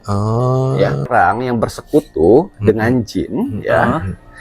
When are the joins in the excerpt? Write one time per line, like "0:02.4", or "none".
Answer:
0:01.1